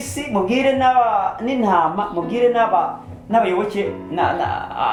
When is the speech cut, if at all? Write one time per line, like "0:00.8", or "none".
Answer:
none

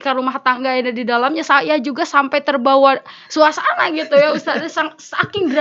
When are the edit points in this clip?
none

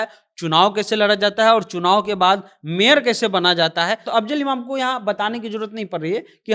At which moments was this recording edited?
0:04.1

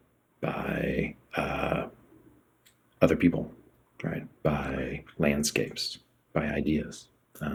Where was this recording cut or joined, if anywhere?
none

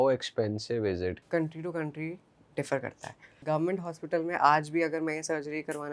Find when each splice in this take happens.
0:01.2
0:03.3

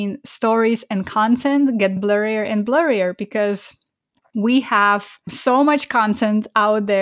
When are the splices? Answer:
none

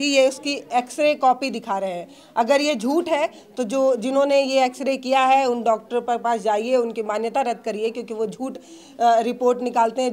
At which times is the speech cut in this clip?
none

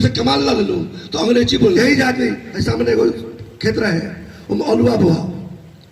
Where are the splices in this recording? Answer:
0:01.8

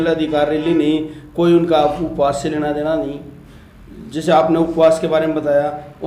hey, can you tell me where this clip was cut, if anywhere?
none

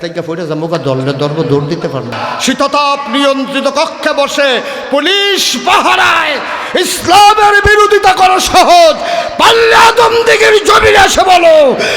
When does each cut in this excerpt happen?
0:02.2

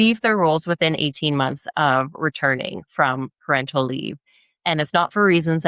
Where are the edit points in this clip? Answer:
none

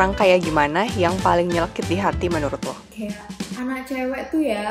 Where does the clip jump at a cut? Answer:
0:03.5

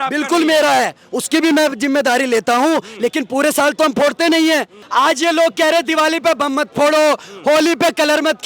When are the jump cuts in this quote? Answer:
0:04.8

